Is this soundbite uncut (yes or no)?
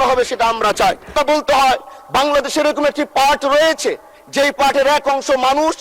no